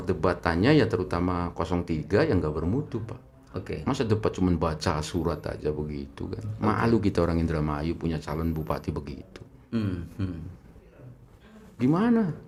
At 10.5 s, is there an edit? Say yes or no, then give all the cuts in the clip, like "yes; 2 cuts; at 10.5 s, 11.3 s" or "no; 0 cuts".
no; 0 cuts